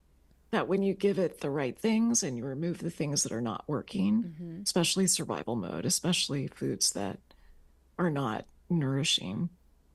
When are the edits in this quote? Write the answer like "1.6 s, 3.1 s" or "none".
none